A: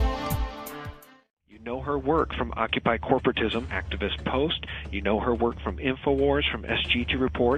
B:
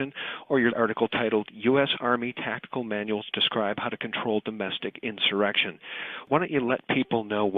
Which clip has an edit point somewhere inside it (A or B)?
B